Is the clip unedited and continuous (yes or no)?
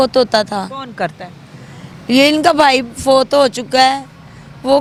yes